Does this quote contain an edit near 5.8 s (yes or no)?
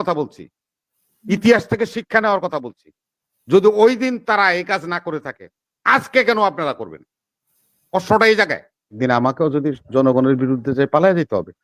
no